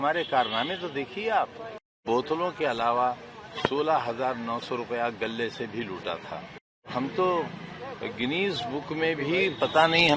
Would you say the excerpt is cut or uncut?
cut